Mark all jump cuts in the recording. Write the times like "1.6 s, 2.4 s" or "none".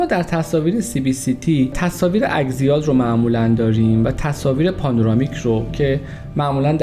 1.8 s